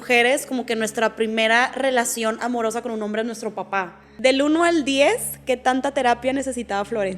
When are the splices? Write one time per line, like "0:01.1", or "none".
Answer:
0:04.0